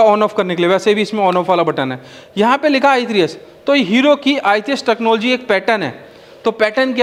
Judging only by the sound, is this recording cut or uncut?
uncut